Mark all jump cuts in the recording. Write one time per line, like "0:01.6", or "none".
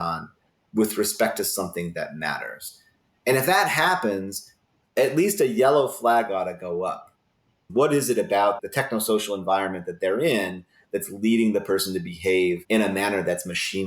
0:07.6
0:08.6
0:12.6